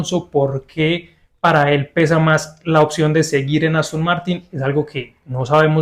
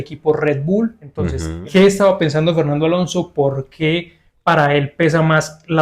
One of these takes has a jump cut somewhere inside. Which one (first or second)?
second